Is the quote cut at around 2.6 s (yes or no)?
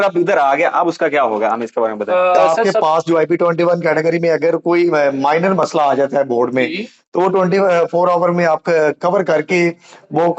yes